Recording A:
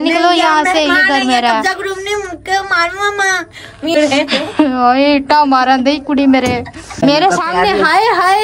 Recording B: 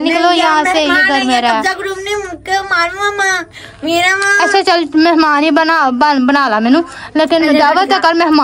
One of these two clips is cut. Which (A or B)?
A